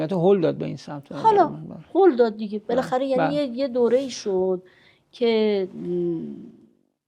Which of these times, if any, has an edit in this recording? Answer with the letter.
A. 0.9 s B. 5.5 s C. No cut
C